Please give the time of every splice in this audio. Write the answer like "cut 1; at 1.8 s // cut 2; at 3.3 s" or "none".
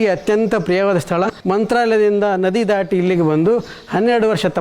cut 1; at 1.3 s